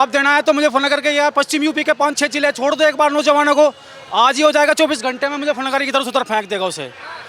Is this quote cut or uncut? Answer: uncut